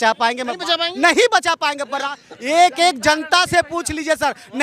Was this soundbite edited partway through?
no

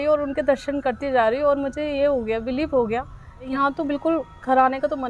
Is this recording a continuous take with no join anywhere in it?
no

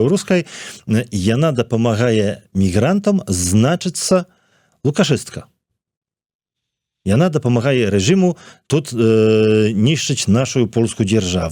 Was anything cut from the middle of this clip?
no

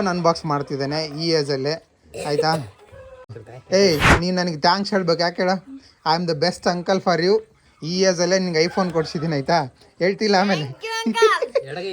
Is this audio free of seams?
no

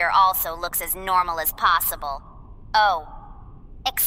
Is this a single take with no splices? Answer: yes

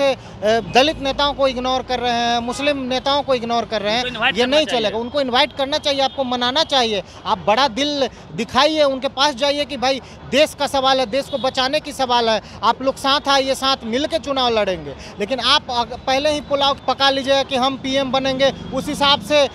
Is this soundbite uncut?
no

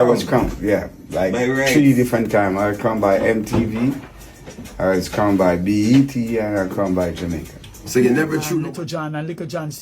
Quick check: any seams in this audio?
yes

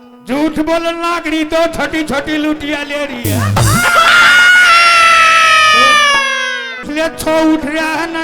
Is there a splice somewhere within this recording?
yes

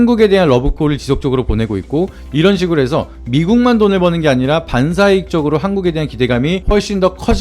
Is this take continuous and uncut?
no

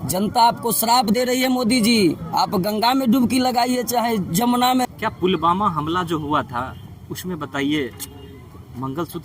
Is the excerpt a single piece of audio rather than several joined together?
no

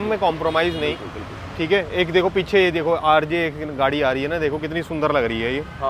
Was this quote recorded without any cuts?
yes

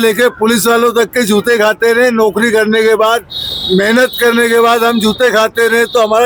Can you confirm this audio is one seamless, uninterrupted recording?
yes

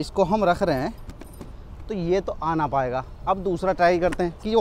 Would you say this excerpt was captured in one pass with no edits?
yes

